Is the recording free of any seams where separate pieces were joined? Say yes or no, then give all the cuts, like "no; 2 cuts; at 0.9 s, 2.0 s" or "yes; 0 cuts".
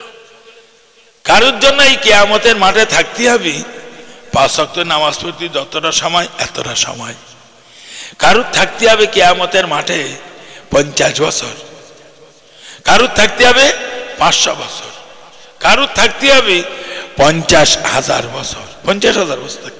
yes; 0 cuts